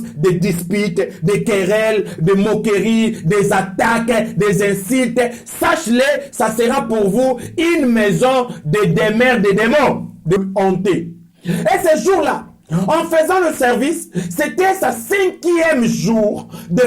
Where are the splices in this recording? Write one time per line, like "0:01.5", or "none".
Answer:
0:10.4